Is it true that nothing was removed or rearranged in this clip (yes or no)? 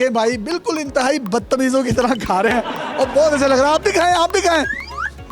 yes